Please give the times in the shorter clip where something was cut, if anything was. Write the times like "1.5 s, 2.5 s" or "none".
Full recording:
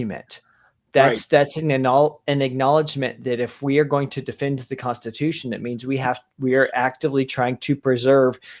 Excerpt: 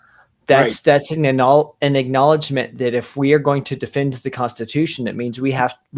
none